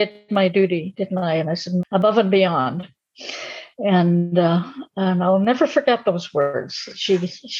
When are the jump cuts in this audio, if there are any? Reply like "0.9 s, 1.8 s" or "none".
1.8 s